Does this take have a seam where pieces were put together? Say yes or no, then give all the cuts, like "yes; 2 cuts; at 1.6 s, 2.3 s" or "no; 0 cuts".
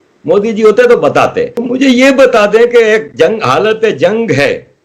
yes; 1 cut; at 1.6 s